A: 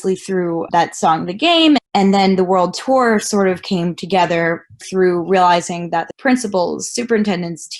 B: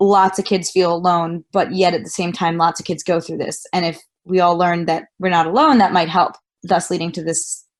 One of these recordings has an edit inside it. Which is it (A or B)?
A